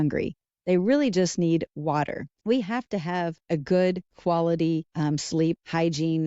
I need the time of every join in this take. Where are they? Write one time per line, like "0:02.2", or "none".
0:02.3
0:03.4
0:04.1
0:05.3